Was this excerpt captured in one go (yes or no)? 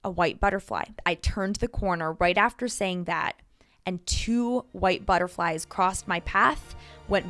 no